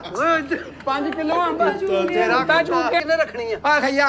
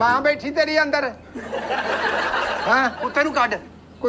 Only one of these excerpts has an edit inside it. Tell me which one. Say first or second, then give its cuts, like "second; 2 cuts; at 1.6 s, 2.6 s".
first; 1 cut; at 3.0 s